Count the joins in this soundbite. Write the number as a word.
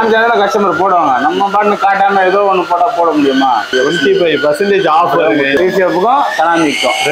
two